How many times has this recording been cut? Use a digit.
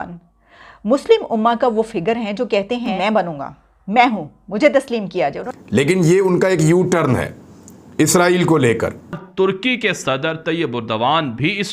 3